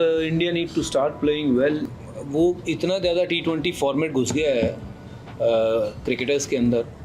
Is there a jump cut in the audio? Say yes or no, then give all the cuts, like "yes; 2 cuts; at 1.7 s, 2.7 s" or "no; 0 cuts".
yes; 1 cut; at 1.9 s